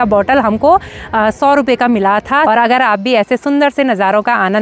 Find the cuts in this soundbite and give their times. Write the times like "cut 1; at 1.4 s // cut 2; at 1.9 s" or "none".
cut 1; at 2.4 s